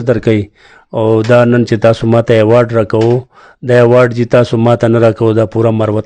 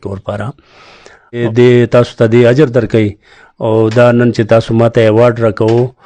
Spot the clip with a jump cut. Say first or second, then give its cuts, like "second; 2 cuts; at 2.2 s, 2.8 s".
second; 1 cut; at 1.4 s